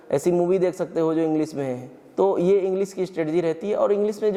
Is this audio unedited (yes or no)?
yes